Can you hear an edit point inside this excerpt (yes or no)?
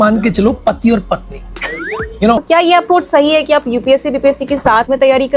yes